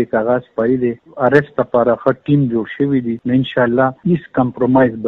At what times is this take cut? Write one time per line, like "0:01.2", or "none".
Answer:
0:01.0
0:03.2
0:04.0